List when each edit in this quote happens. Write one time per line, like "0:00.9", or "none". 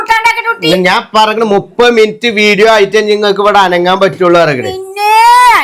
none